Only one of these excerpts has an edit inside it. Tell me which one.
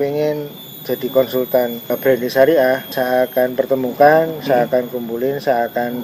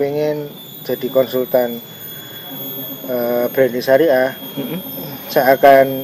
first; 2 cuts; at 1.9 s, 2.9 s

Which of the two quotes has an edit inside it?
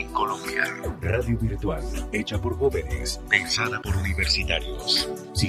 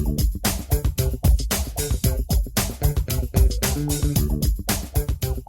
second; 1 cut; at 4.1 s

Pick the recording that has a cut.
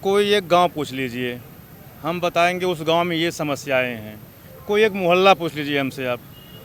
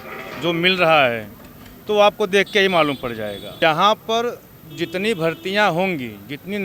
second; 1 cut; at 3.6 s

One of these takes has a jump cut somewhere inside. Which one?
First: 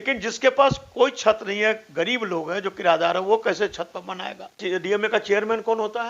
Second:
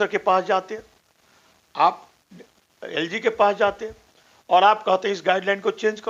first; 1 cut; at 4.6 s

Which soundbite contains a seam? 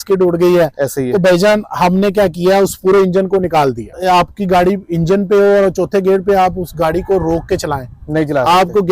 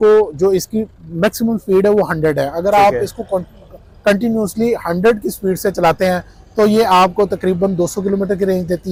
first; 1 cut; at 3.9 s

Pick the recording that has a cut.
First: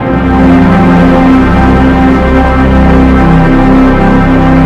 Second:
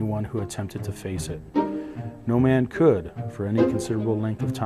first; 1 cut; at 1.2 s

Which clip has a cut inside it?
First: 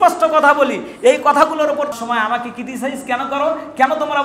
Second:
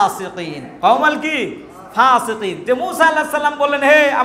first; 1 cut; at 1.9 s

